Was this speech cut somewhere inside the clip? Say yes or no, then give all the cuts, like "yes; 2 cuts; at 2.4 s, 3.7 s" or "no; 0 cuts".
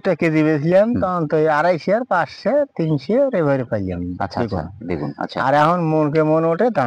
no; 0 cuts